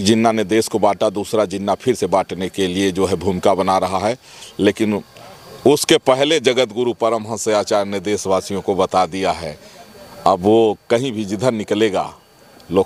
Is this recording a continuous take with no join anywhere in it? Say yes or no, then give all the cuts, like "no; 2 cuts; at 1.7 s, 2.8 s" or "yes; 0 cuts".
yes; 0 cuts